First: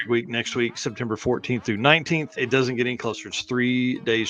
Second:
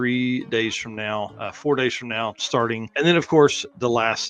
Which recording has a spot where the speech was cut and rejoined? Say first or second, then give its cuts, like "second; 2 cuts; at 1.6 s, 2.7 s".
second; 1 cut; at 2.9 s